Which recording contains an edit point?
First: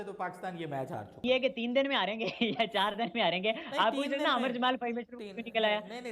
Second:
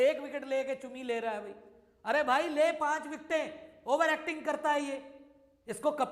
first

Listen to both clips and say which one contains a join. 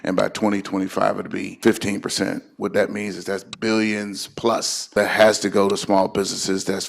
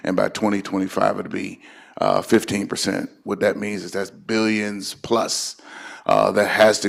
first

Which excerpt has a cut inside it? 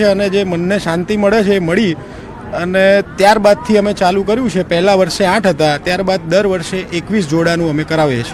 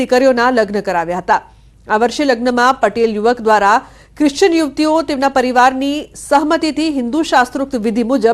second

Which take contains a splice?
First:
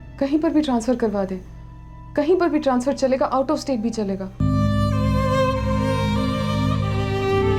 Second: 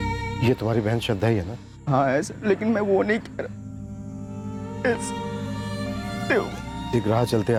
first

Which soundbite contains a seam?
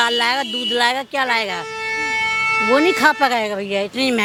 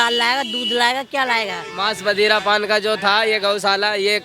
second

